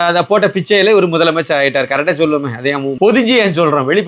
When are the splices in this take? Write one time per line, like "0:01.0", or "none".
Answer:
0:02.9